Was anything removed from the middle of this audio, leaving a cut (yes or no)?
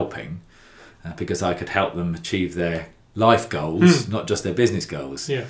no